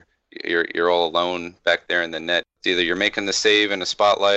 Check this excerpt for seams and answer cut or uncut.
cut